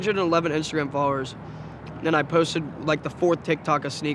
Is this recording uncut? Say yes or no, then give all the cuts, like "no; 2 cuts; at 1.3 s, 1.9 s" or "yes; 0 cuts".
yes; 0 cuts